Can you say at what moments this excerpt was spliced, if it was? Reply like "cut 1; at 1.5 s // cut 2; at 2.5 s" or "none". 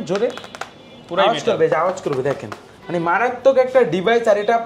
none